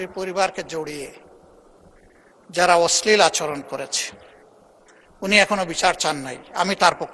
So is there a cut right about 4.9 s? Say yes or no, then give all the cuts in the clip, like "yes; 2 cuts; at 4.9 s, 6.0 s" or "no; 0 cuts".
no; 0 cuts